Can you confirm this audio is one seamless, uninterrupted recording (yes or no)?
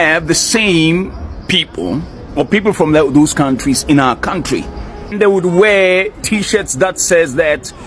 no